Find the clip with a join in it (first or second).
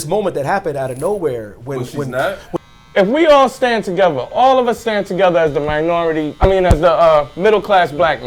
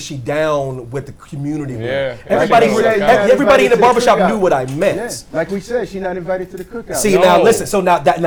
first